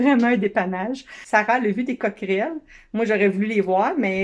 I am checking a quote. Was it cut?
yes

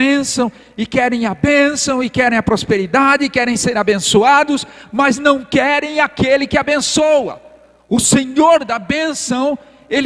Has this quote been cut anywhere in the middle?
no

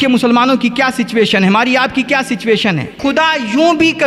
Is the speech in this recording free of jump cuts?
no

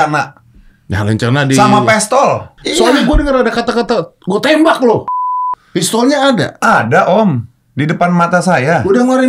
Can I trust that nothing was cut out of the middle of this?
no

